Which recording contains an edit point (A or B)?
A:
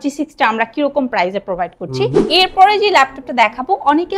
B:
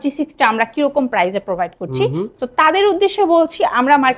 A